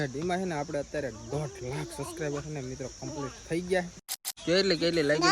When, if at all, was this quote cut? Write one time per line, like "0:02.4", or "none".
0:04.2